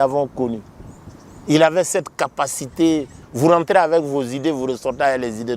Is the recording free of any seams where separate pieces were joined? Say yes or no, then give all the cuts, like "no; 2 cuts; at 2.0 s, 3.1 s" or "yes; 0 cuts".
no; 1 cut; at 3.2 s